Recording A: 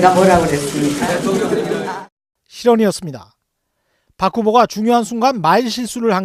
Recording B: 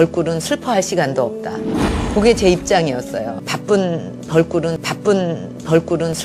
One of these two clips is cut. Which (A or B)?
B